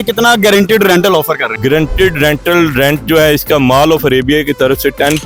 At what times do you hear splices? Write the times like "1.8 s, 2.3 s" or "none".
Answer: none